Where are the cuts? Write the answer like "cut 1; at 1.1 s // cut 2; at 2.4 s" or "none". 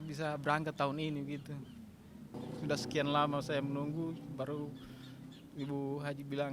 cut 1; at 2.5 s